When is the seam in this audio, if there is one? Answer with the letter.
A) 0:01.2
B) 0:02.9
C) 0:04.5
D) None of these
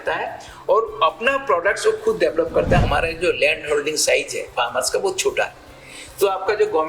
B